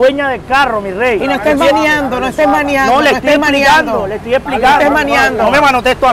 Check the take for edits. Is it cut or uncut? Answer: uncut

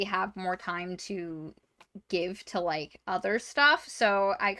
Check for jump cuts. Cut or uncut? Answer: uncut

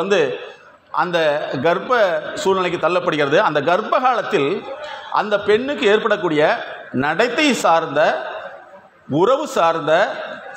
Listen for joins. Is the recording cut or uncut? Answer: uncut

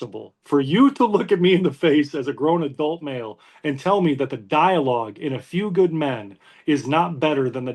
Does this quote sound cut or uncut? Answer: uncut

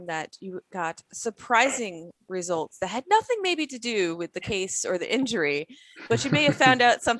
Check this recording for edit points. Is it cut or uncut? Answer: uncut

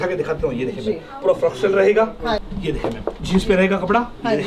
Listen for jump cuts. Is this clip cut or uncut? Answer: cut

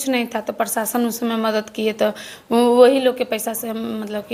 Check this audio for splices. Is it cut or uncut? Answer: uncut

